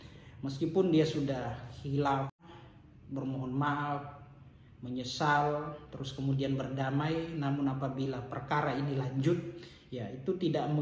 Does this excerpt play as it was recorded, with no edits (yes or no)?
no